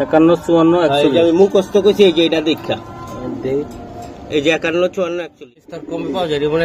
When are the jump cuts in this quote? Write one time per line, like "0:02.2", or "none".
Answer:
0:05.5